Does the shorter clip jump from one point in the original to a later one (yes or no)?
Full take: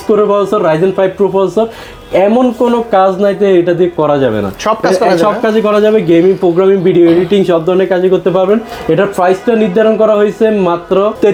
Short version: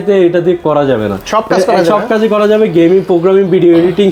no